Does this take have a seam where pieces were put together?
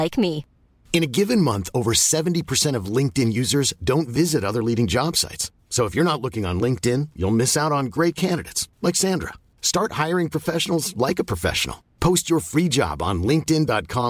no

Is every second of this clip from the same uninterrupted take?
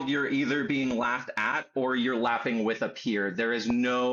yes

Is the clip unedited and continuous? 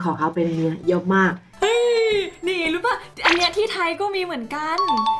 no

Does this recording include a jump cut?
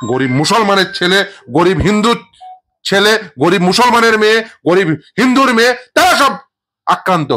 no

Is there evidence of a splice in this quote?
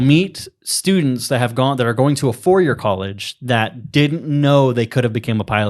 no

